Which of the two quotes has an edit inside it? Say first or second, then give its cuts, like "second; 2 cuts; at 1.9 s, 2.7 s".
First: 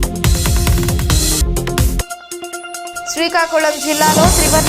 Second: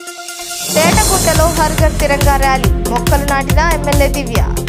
first; 1 cut; at 1.1 s